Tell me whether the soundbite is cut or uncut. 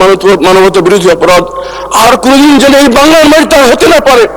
uncut